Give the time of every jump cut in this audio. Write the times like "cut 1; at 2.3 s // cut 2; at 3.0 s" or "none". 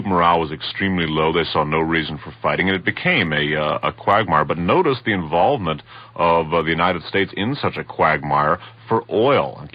cut 1; at 2.8 s